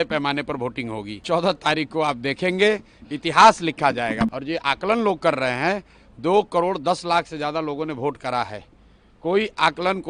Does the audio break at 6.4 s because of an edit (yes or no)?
no